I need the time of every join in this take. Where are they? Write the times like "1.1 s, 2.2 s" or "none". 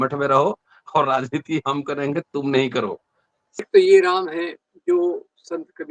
3.6 s